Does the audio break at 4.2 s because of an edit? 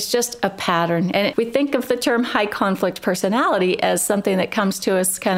no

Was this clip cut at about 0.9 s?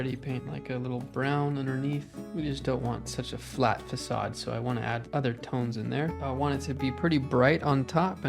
no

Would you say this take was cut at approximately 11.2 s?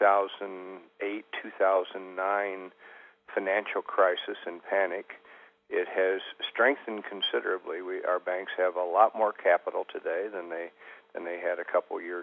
yes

